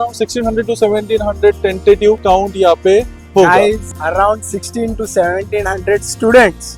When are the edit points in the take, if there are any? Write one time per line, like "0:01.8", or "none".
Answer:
0:02.2
0:03.9